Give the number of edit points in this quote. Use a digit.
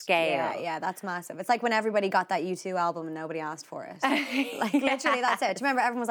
0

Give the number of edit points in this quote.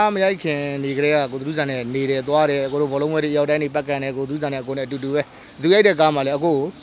1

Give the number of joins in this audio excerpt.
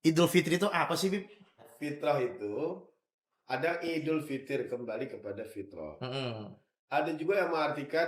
1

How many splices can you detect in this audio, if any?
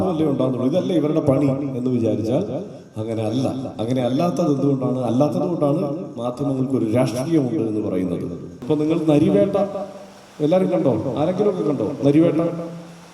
1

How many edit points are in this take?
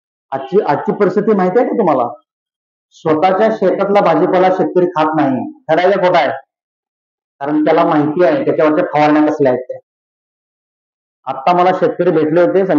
0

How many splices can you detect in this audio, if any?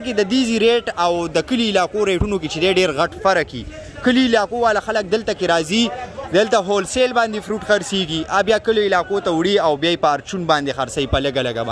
0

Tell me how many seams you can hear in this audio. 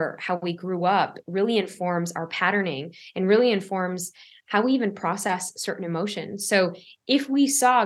0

